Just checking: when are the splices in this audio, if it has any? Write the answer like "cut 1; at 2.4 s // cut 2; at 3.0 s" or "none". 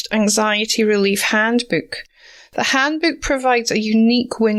none